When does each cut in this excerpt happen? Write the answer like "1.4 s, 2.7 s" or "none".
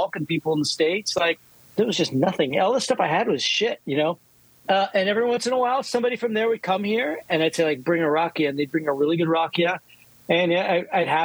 1.5 s

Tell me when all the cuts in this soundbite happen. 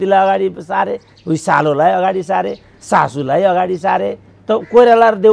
none

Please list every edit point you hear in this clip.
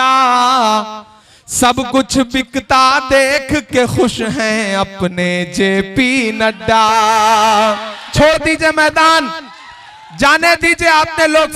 8.1 s

